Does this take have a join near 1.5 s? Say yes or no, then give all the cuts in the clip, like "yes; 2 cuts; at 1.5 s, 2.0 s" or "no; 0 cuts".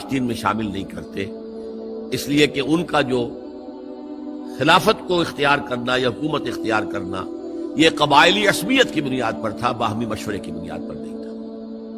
no; 1 cut; at 10.6 s